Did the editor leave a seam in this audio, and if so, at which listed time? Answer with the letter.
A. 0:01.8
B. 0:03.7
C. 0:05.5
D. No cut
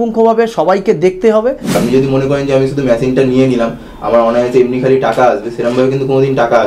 A